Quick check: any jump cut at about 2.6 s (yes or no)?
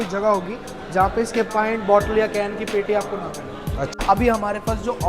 no